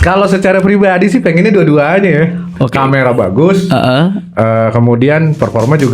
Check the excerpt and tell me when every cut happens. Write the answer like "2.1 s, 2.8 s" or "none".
none